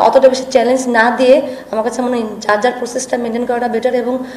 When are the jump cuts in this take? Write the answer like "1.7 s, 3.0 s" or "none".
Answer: none